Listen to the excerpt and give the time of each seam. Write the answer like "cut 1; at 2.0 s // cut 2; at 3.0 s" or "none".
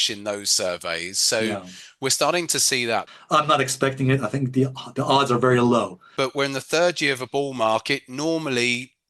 cut 1; at 3.1 s // cut 2; at 6.0 s